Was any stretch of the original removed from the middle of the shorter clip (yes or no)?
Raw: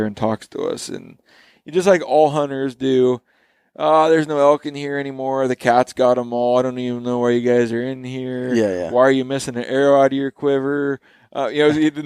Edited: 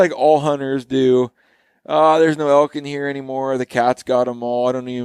no